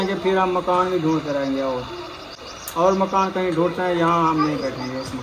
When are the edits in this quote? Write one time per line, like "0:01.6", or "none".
none